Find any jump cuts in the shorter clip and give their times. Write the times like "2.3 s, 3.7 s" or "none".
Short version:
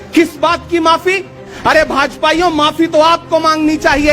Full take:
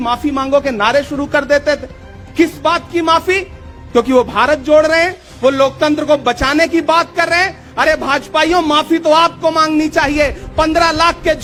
1.5 s